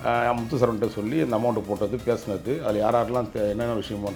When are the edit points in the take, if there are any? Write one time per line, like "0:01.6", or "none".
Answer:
none